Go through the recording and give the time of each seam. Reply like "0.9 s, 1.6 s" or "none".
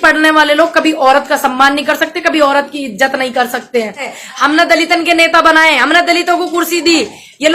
4.2 s